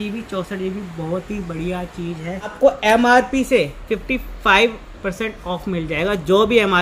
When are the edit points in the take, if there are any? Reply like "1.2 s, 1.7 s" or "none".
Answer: 2.5 s